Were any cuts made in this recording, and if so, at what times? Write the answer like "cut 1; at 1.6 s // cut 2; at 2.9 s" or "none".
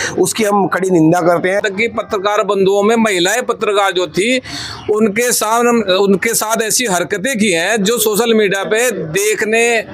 cut 1; at 1.6 s